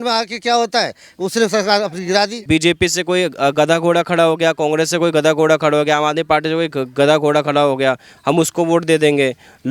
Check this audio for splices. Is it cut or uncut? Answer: cut